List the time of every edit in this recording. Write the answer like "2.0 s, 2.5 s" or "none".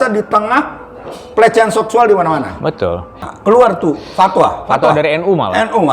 3.3 s